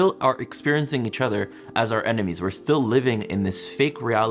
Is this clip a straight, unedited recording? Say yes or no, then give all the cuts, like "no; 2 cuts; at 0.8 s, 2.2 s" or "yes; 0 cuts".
yes; 0 cuts